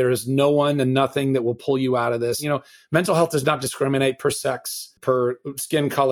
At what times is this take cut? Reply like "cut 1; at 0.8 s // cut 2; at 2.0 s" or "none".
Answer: cut 1; at 2.4 s // cut 2; at 4.9 s